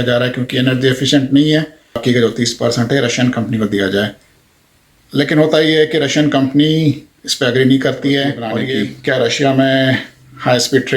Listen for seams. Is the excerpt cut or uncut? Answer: cut